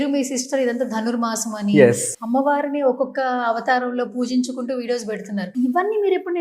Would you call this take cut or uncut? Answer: cut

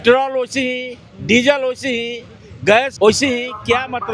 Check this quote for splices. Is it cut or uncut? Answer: cut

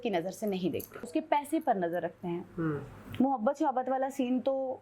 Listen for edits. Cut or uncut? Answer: cut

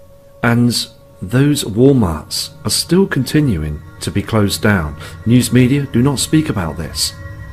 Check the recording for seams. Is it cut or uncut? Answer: cut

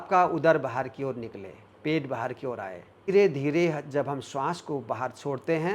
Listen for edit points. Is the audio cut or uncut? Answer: cut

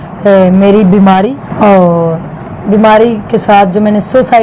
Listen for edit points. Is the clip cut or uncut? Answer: cut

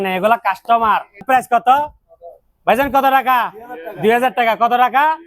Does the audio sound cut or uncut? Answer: cut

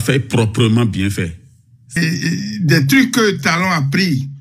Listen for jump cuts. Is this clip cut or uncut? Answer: cut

